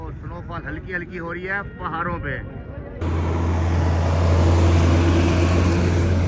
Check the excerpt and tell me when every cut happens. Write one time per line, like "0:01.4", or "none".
0:03.0